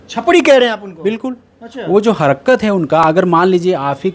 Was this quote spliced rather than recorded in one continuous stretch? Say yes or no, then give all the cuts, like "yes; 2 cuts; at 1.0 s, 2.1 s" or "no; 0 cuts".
no; 0 cuts